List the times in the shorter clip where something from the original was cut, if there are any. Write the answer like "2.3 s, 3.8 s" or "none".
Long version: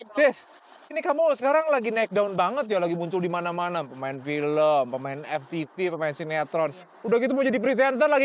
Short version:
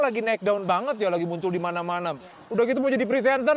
2.3 s

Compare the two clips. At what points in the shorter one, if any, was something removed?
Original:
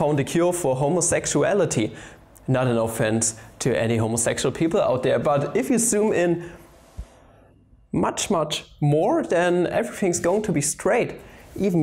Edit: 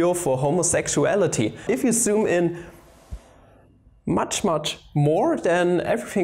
1.6 s

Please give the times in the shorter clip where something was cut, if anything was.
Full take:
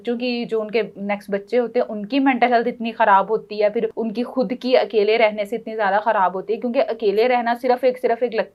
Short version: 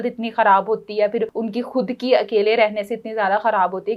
none

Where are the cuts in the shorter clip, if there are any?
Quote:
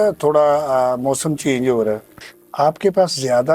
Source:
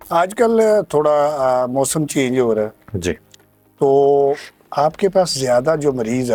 2.4 s

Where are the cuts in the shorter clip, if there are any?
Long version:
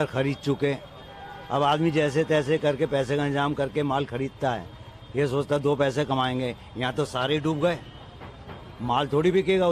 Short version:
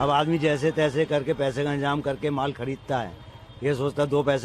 none

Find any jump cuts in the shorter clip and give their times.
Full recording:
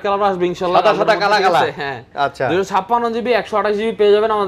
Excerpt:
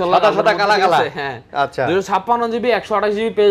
none

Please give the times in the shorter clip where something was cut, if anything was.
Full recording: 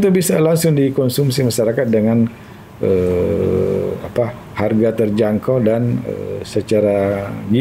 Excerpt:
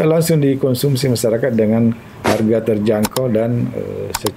2.1 s

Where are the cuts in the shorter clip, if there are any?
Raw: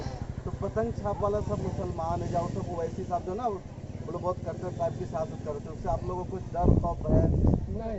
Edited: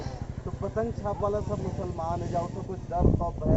2.6 s

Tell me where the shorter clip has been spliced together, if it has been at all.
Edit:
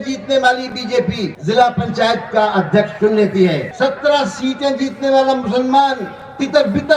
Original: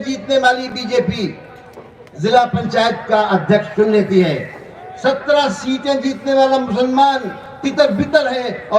1.3 s, 3.7 s

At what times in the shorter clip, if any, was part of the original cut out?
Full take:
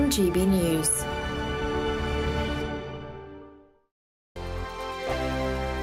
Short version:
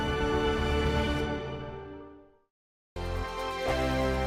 none

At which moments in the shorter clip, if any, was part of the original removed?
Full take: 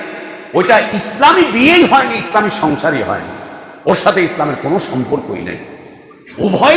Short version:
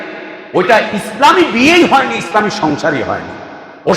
none

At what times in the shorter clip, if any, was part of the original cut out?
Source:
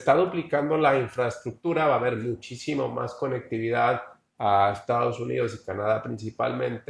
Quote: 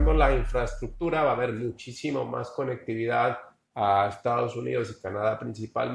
none

